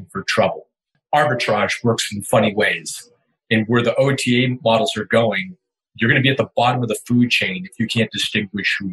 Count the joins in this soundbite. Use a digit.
1